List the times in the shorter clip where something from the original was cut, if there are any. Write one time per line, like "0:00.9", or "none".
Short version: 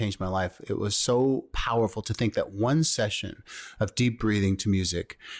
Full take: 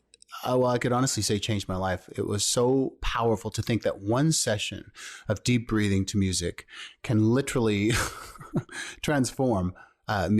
none

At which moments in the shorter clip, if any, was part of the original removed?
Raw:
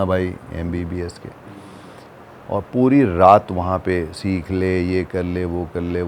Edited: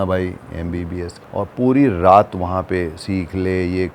0:01.2

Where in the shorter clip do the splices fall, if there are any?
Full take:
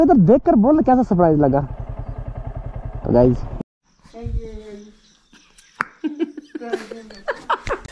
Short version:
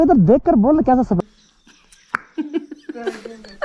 0:01.2

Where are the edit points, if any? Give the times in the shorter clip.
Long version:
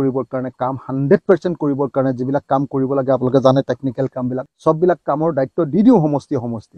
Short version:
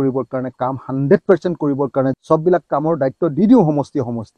0:02.2

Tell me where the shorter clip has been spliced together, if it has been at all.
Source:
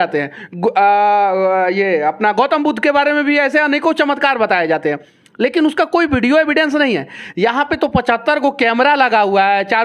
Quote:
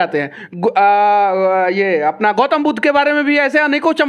none

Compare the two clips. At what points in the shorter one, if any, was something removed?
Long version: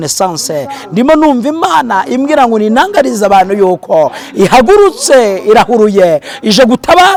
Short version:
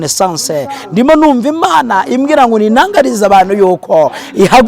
none

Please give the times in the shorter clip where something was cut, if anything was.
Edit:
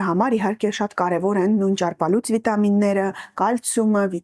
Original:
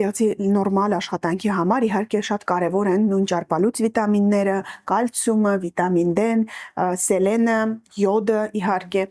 none

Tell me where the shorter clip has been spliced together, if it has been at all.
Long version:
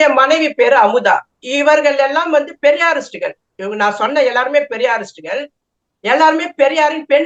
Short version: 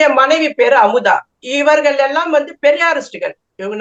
none

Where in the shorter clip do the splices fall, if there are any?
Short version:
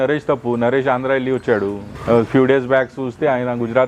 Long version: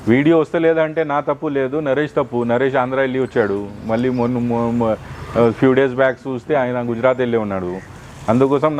0:01.9

